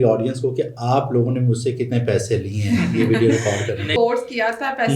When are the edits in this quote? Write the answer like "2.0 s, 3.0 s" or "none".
4.0 s

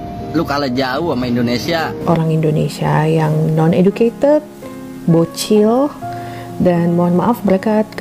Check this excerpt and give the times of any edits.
2.0 s

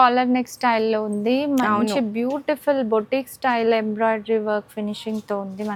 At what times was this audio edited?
none

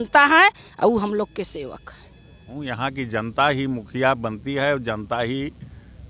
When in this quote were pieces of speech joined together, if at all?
2.5 s

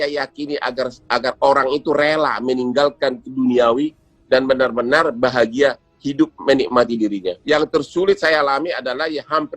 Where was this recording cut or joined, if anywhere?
7.4 s

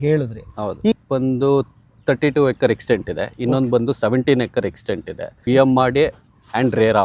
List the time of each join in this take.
0.9 s, 5.3 s

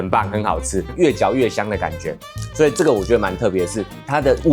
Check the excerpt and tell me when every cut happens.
0.9 s

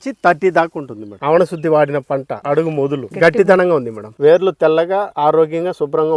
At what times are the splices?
1.1 s, 4.1 s

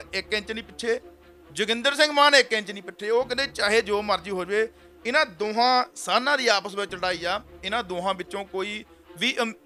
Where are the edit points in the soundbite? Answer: none

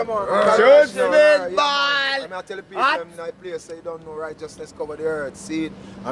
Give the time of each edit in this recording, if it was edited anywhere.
5.2 s

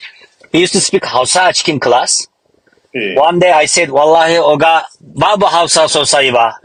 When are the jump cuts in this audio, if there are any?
none

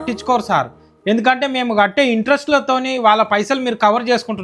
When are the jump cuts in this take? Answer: none

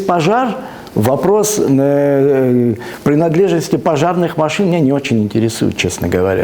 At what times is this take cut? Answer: none

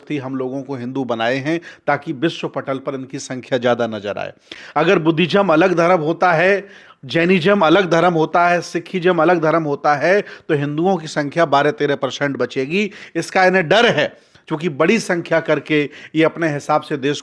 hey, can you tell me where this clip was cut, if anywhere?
none

